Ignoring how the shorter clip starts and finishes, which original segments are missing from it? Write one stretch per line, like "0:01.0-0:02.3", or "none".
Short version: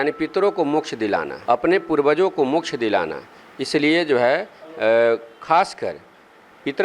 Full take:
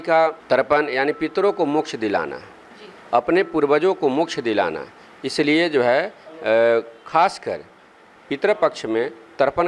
0:02.3-0:03.0